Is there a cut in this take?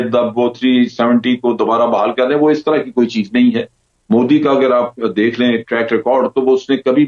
no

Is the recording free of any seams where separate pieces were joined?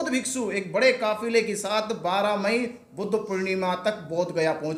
yes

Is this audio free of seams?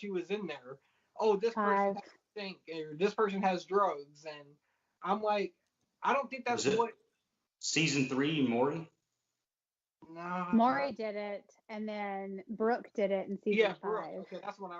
yes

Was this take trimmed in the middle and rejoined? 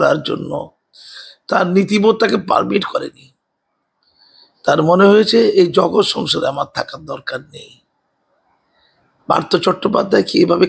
no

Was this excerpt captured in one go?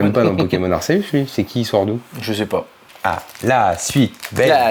yes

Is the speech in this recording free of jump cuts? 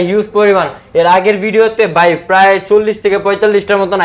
yes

